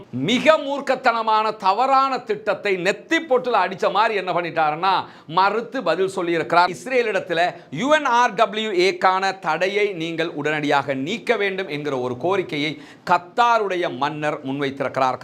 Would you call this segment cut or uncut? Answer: cut